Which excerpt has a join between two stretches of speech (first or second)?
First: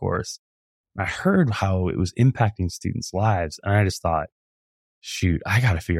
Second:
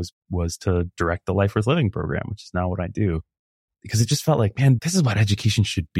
second